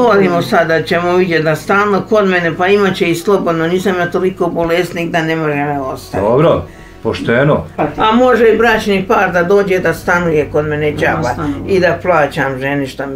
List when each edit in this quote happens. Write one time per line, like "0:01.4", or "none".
0:07.7